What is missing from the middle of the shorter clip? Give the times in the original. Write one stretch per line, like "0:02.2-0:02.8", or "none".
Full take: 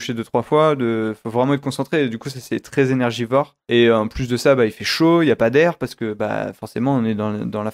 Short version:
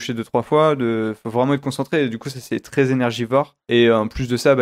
none